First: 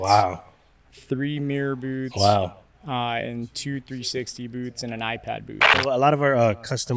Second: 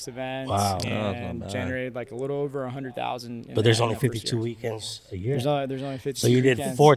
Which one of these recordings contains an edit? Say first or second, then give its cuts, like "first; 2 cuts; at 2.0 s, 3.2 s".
first; 1 cut; at 5.7 s